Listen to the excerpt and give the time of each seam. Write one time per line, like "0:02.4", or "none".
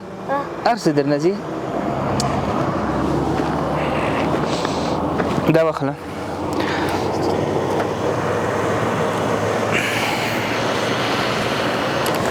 none